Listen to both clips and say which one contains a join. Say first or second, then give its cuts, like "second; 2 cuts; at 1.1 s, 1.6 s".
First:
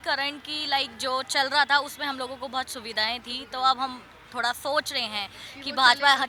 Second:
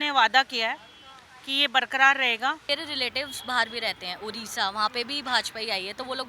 second; 1 cut; at 2.7 s